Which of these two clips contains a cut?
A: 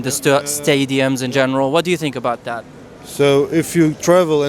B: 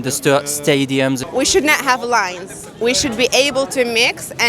B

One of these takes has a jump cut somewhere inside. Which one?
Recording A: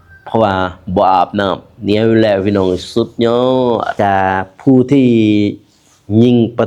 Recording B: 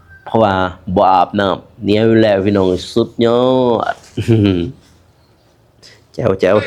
A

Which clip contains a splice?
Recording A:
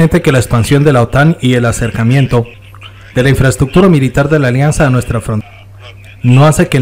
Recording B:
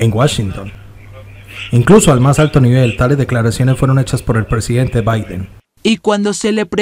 B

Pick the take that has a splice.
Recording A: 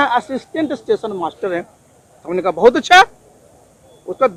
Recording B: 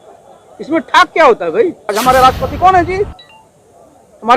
B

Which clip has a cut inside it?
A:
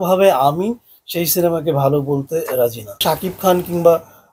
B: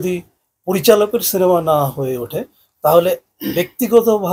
A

